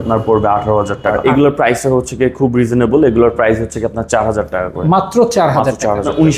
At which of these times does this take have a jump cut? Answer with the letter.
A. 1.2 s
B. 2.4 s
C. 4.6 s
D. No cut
A